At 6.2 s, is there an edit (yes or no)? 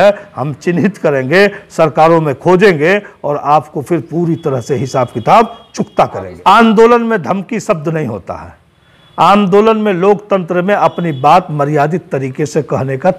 yes